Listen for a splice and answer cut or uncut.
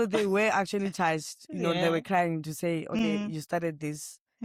uncut